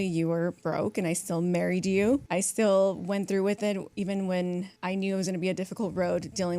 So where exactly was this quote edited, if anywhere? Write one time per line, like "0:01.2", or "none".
0:02.3
0:03.9
0:04.7